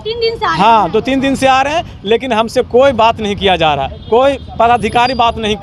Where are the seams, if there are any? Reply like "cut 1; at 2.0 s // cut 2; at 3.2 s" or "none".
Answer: none